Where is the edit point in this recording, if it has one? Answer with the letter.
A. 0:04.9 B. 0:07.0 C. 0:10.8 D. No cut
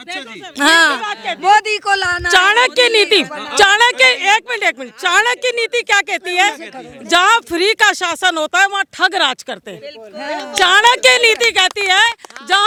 D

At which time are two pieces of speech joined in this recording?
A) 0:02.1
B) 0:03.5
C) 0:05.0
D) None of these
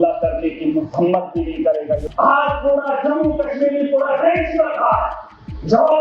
A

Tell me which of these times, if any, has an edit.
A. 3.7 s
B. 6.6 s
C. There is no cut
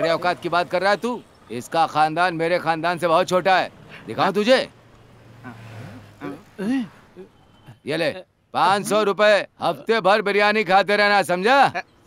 C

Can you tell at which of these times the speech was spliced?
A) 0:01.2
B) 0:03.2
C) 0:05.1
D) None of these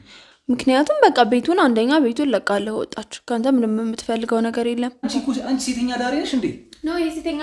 C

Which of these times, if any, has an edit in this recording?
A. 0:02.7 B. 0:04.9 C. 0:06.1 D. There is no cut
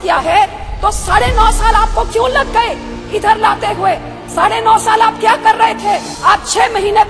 C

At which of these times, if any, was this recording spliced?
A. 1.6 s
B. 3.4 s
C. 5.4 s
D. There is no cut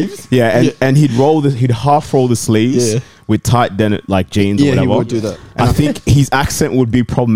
C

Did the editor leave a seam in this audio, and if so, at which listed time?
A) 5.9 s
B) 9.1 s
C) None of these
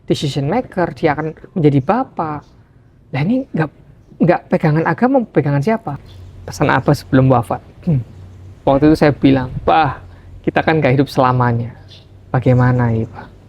A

